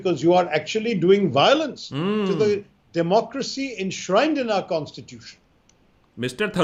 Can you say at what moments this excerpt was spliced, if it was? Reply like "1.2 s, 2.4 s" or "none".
none